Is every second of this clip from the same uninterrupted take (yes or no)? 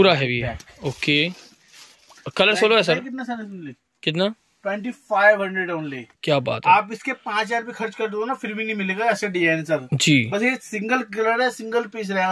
yes